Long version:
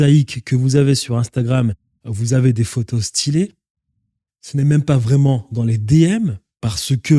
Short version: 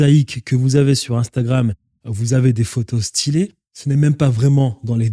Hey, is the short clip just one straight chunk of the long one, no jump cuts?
no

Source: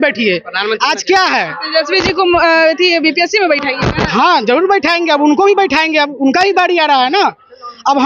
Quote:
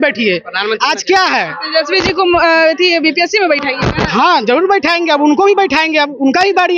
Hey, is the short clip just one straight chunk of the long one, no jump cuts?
yes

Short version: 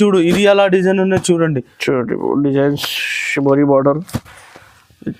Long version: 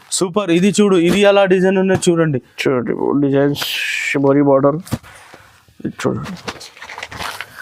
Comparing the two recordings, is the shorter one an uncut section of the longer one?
yes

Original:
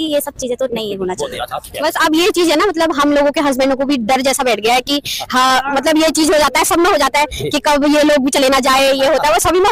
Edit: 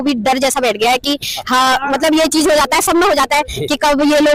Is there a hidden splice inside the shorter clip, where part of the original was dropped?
no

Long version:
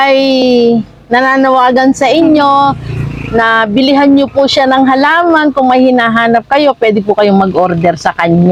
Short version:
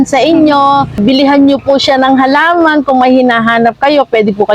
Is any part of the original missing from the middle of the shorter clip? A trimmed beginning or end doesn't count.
yes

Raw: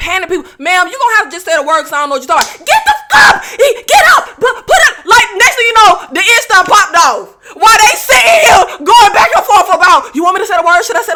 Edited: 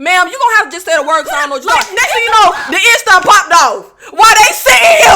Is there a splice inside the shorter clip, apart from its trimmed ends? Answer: yes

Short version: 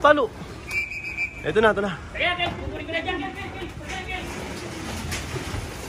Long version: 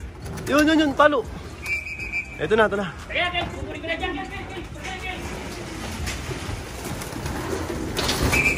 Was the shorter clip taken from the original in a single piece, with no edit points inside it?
yes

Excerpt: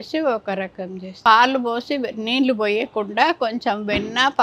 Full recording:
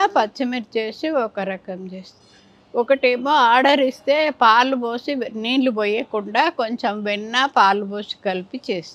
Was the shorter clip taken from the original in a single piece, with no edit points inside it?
no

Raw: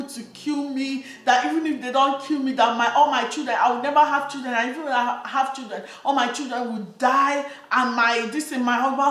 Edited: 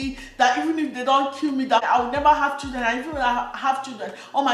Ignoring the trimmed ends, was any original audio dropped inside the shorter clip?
yes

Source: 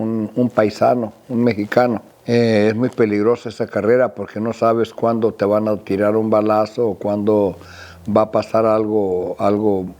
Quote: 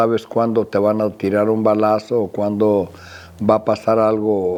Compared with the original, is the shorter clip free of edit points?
yes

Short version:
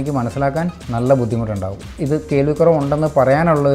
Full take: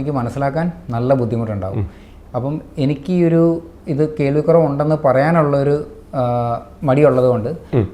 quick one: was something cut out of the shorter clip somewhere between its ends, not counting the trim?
yes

